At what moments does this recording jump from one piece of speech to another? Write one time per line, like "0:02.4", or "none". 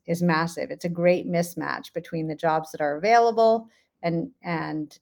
none